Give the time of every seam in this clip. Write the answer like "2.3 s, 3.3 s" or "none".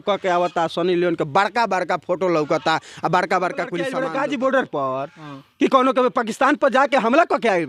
3.9 s